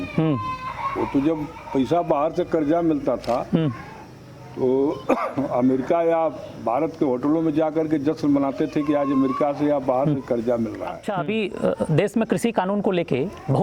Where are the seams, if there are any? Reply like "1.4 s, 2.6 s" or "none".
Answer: 11.0 s

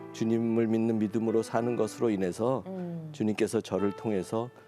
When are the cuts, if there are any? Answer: none

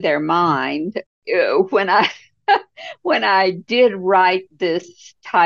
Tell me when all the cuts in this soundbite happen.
1.0 s

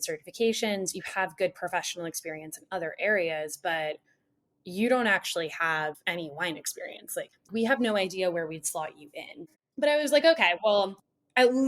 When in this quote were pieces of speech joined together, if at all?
6.0 s, 7.5 s, 9.5 s

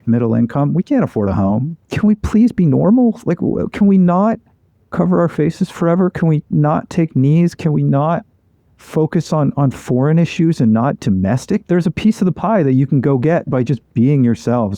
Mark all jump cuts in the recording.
1.7 s, 11.6 s

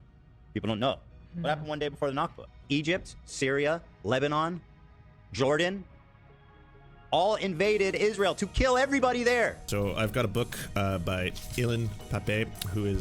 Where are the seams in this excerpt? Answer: 2.6 s, 9.6 s

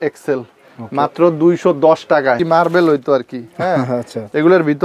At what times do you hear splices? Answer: 2.4 s

